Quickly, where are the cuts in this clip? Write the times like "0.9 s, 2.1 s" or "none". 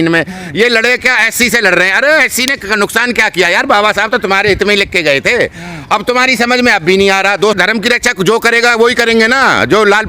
7.6 s